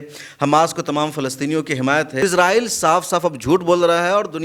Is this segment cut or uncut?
cut